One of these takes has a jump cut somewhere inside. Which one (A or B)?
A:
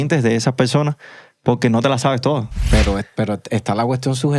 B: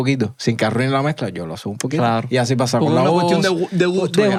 A